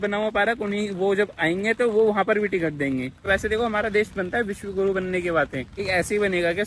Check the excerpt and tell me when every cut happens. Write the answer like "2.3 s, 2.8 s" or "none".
3.3 s, 5.8 s